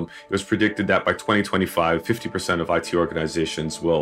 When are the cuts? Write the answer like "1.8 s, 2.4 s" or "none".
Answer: none